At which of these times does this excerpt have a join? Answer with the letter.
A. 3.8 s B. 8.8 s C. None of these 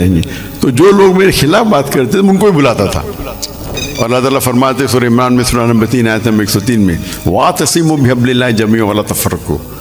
A